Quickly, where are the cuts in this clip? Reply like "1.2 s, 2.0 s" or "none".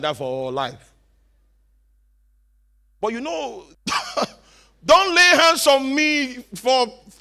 3.7 s